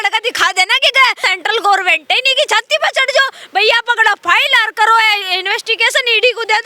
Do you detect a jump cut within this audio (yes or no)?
yes